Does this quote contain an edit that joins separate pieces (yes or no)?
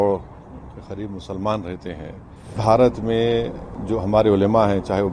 yes